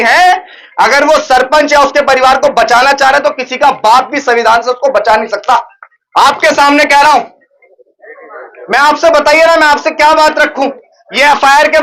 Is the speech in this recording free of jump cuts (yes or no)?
no